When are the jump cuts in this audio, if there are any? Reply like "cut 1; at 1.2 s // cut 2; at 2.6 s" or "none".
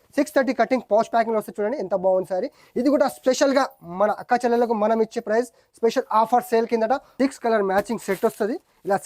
cut 1; at 7.1 s